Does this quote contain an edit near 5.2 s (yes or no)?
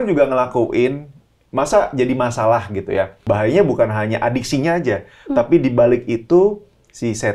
no